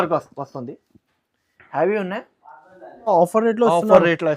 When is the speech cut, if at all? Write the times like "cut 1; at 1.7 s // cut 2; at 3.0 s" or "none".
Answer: cut 1; at 3.1 s